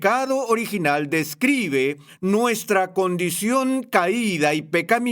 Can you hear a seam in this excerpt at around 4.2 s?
no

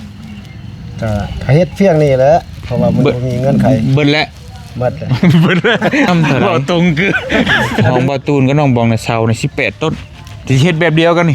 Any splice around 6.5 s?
no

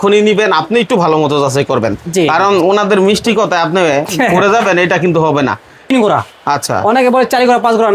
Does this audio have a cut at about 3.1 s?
no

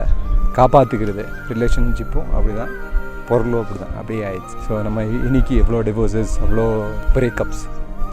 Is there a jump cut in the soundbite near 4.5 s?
yes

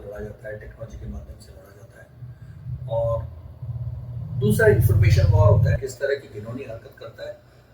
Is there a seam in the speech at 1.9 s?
no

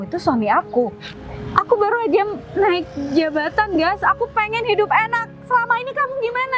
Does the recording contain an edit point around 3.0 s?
no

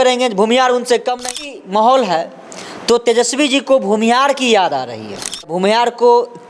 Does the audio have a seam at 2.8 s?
no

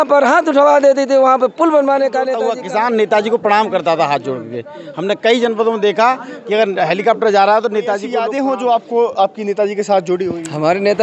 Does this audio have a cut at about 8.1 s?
yes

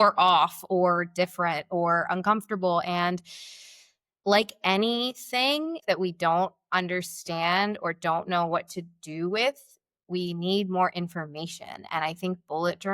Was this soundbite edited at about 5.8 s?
yes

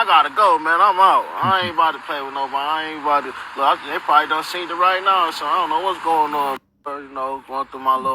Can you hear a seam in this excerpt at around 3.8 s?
no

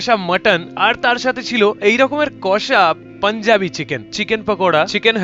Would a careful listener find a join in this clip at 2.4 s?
no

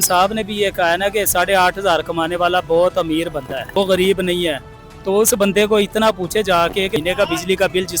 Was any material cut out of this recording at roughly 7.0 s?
yes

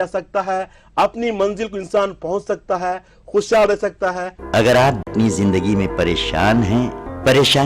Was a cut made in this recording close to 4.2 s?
yes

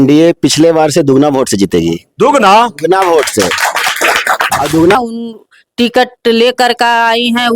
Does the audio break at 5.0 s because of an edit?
yes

